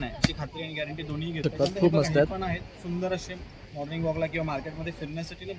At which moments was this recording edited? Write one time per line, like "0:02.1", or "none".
0:01.5